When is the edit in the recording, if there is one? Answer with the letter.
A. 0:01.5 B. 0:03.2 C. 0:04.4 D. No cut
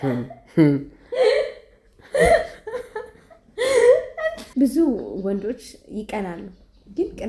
C